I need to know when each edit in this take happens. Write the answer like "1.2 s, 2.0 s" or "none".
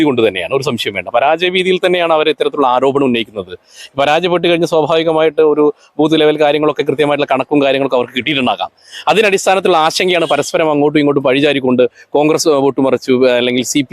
none